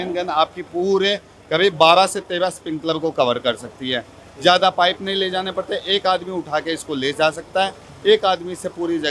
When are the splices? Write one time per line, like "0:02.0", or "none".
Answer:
none